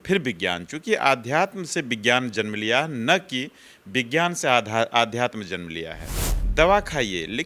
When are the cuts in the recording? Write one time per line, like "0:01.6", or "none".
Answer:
none